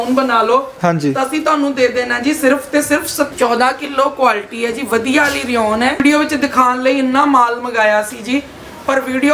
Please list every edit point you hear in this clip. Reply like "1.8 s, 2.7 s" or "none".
3.3 s, 6.0 s